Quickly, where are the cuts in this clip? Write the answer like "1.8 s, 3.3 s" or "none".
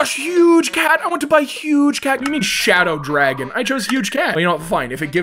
2.2 s